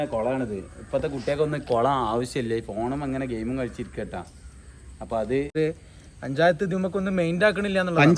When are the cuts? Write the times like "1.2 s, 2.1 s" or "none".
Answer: 5.5 s